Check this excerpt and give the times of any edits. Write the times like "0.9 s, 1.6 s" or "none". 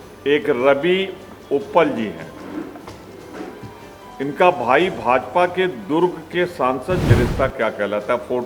7.1 s